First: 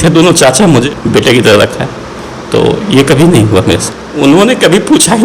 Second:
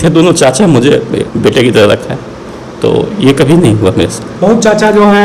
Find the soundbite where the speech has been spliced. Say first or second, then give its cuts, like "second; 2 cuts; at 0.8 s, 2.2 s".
first; 2 cuts; at 0.9 s, 3.9 s